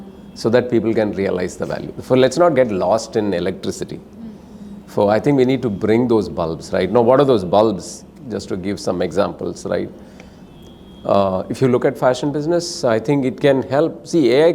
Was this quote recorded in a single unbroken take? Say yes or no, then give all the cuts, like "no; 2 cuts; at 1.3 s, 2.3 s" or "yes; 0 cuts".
yes; 0 cuts